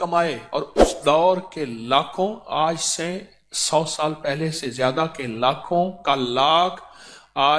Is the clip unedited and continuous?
yes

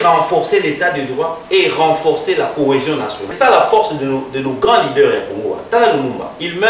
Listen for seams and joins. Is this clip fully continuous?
no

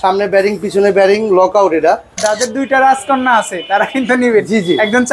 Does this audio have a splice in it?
yes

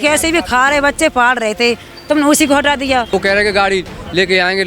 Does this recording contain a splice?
yes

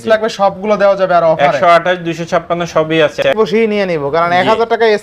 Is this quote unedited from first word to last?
no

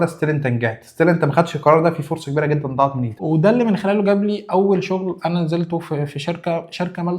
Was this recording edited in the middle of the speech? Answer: yes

